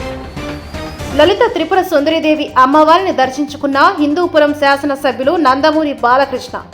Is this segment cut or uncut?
cut